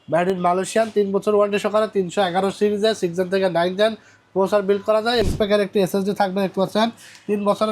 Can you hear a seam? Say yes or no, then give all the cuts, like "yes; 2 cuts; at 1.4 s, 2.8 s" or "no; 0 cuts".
yes; 1 cut; at 5.2 s